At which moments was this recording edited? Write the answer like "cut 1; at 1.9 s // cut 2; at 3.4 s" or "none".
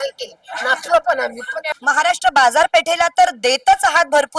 cut 1; at 1.7 s